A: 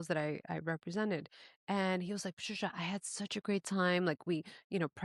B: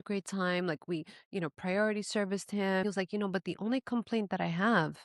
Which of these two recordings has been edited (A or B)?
B